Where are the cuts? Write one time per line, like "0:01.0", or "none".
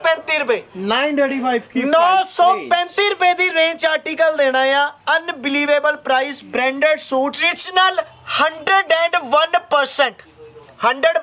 0:07.5